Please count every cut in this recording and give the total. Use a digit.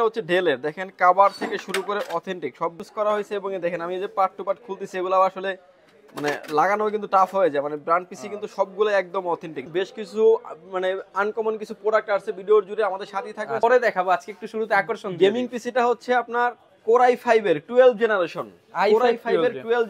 3